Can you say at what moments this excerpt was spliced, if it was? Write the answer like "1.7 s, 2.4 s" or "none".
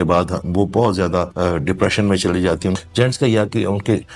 1.3 s, 2.8 s